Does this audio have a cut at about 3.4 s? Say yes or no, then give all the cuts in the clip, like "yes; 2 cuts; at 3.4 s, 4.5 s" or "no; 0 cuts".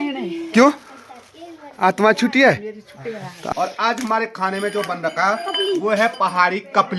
yes; 1 cut; at 3.4 s